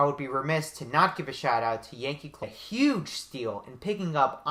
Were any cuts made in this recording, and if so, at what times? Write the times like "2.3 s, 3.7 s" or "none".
none